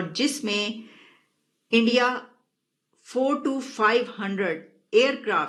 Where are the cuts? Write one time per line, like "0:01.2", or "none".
none